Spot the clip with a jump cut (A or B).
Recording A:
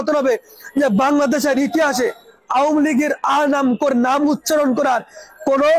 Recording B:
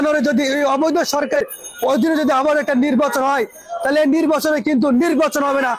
B